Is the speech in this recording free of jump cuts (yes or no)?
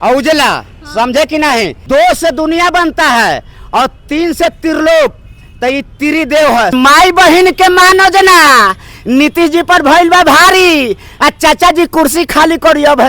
no